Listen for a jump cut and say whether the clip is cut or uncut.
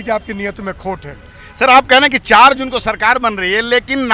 uncut